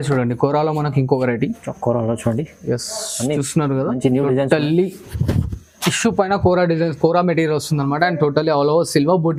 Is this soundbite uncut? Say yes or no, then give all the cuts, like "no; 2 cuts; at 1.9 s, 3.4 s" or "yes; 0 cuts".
yes; 0 cuts